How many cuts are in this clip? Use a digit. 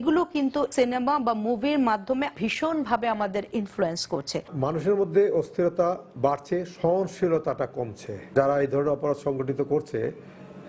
0